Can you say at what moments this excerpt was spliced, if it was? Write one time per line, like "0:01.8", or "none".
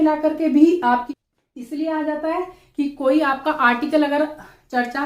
0:01.1